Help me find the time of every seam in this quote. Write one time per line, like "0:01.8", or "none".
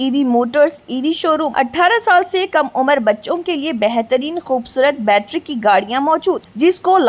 0:01.5